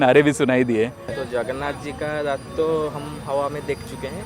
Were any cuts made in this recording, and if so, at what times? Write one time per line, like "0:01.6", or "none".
0:01.1